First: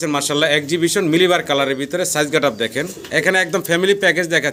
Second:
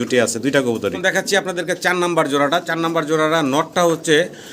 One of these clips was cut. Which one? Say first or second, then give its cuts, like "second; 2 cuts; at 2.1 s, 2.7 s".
second; 1 cut; at 1.0 s